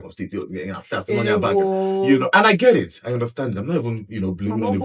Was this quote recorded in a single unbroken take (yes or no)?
yes